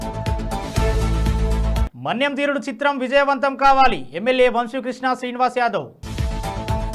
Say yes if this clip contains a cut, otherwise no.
no